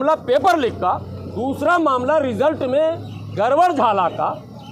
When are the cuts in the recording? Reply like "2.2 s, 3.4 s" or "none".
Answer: none